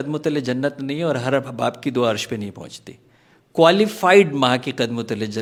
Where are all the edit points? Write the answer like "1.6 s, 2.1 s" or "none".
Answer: none

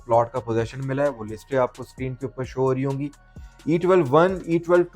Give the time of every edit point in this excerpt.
3.3 s

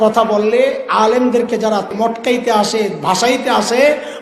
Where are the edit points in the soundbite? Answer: 1.9 s

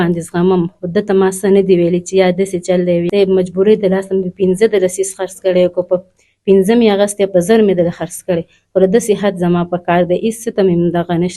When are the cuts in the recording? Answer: 3.1 s

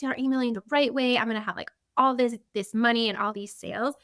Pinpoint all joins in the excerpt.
none

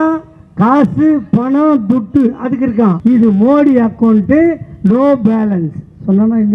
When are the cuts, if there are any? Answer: 3.0 s

